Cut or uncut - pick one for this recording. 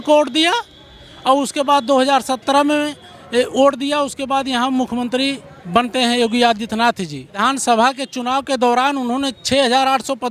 cut